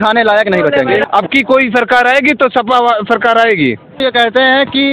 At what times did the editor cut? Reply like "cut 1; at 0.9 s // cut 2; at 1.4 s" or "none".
cut 1; at 1.0 s // cut 2; at 4.0 s